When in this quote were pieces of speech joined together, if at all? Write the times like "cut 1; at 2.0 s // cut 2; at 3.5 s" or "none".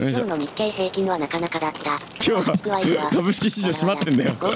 cut 1; at 2.1 s